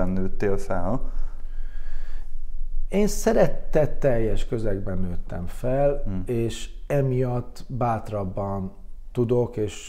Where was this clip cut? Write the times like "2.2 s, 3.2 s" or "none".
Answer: none